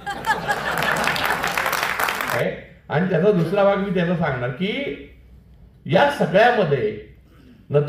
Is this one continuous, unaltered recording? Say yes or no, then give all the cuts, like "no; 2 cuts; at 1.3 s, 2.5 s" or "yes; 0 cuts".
no; 1 cut; at 2.4 s